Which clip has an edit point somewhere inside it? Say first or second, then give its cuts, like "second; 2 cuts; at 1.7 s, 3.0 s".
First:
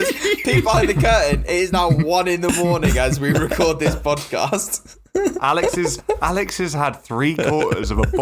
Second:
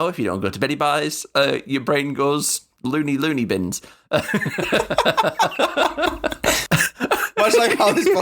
second; 2 cuts; at 2.8 s, 6.9 s